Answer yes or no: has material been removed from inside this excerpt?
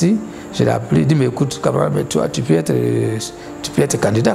no